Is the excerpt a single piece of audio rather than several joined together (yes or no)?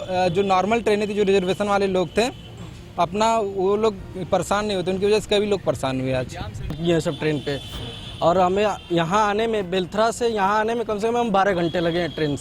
no